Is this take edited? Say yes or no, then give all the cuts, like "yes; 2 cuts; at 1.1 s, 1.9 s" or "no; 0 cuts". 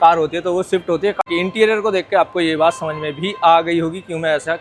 yes; 1 cut; at 1.2 s